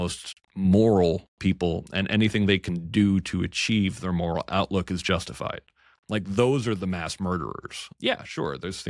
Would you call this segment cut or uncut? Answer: cut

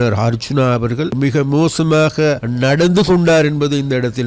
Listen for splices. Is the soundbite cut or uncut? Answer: cut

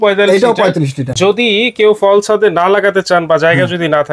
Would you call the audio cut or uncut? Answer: uncut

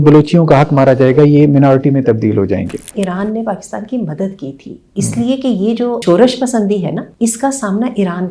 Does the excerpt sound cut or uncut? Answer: cut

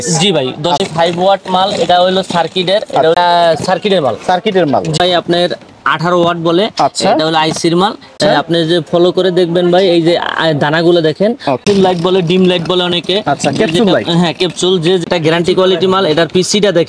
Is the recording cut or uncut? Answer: cut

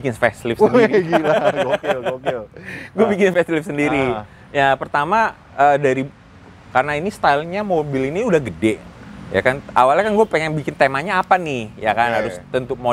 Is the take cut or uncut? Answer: uncut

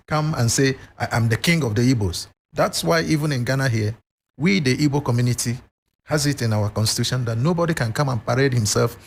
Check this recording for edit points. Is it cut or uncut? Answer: uncut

